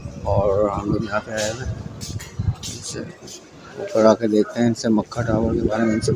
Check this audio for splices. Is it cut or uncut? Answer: uncut